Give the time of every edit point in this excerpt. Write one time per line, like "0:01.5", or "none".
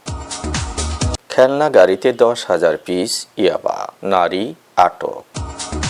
0:03.9